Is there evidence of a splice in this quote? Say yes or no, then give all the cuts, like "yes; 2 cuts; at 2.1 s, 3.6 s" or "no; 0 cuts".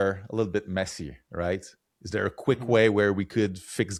no; 0 cuts